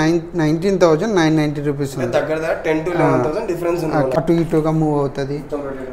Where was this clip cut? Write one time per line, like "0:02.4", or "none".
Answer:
0:04.2